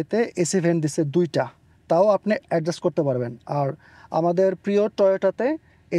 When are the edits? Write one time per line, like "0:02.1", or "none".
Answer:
none